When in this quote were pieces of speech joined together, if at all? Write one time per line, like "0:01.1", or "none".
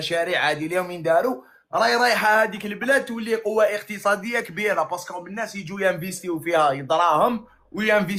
none